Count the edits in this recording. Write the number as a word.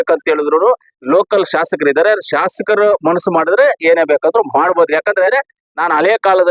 one